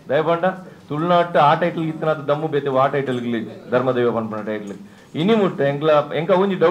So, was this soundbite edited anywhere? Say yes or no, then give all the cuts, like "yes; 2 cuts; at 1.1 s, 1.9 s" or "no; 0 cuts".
no; 0 cuts